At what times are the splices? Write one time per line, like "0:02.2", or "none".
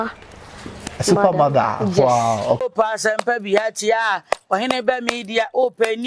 0:02.6